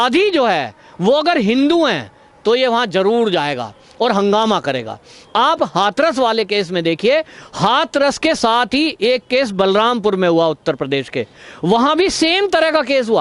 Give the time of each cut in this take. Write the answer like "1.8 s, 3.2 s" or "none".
none